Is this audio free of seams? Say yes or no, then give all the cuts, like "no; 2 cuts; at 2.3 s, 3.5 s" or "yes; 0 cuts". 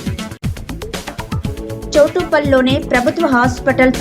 no; 1 cut; at 1.6 s